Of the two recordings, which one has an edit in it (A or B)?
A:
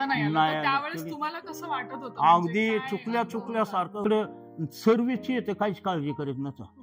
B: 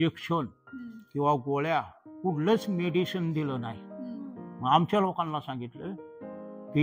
A